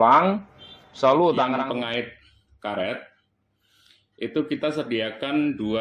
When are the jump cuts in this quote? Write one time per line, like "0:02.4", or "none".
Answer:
0:01.6